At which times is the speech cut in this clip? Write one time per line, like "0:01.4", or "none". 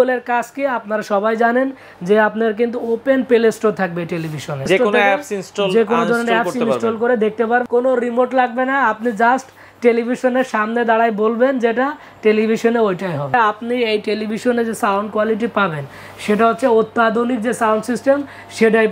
0:04.7
0:07.6
0:13.3